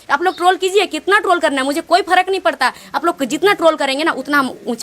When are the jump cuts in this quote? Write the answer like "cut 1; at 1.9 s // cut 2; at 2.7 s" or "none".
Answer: none